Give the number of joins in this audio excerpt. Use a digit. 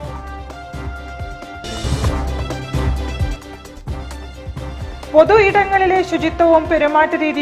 1